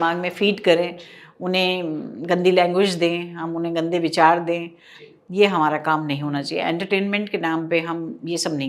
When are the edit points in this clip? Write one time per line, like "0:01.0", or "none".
none